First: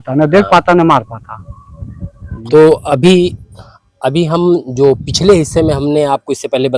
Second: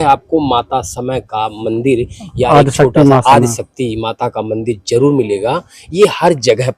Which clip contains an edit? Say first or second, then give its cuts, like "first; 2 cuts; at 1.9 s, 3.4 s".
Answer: first; 1 cut; at 2.4 s